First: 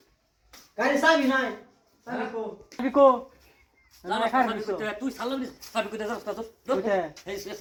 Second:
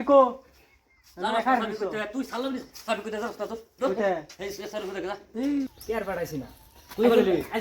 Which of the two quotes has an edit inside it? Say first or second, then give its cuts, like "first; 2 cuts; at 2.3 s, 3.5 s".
second; 1 cut; at 5.7 s